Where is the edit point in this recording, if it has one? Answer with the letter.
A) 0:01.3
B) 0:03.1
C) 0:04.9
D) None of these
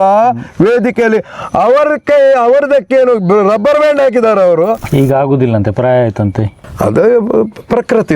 C